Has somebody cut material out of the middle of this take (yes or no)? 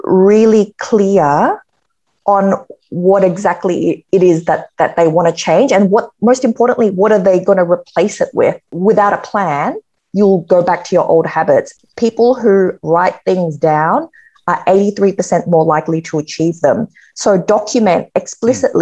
yes